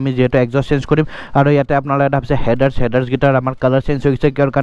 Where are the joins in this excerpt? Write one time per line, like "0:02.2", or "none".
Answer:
none